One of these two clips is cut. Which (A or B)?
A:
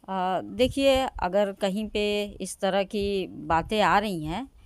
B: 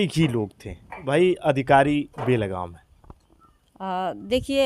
B